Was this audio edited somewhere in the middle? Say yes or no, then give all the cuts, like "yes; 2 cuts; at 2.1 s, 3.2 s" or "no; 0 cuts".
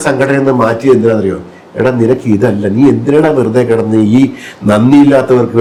no; 0 cuts